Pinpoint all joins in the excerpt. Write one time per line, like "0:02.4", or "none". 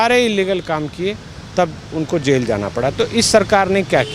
none